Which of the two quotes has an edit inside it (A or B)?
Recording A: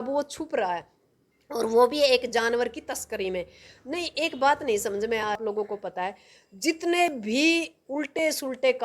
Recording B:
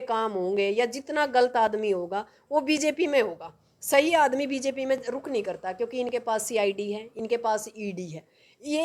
A